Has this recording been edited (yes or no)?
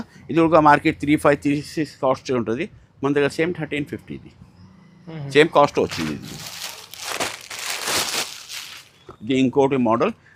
no